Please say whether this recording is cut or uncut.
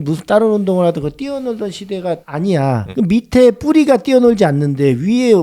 uncut